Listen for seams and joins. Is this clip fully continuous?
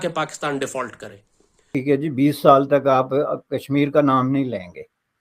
no; 1 cut; at 1.8 s

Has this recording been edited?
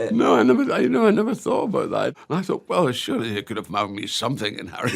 yes; 1 cut; at 2.1 s

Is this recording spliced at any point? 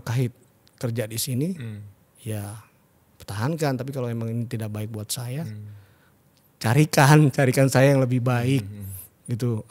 no; 0 cuts

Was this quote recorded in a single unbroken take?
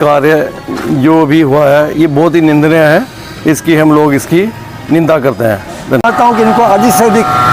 no; 1 cut; at 6.1 s

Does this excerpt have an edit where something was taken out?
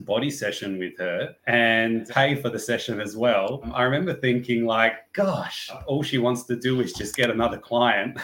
yes; 3 cuts; at 2.0 s, 3.7 s, 5.8 s

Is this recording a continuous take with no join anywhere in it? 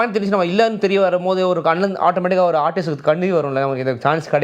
yes; 0 cuts

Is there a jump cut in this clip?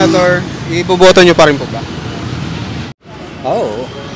yes; 1 cut; at 2.9 s

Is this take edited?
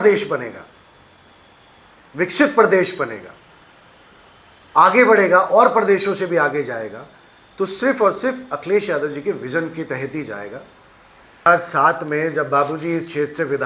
yes; 1 cut; at 11.5 s

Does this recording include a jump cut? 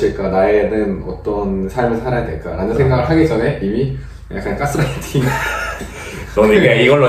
no; 0 cuts

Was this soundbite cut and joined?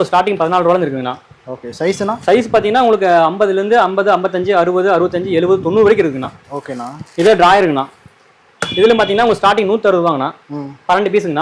no; 0 cuts

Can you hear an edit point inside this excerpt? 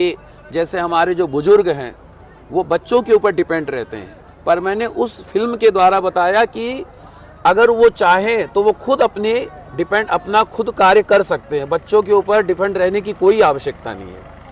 no; 0 cuts

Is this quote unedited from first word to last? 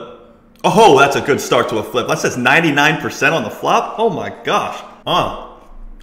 no; 1 cut; at 4.9 s

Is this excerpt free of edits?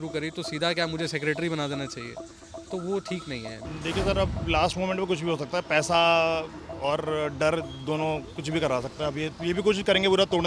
no; 1 cut; at 3.5 s

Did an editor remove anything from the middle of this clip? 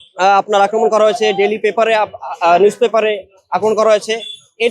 no; 0 cuts

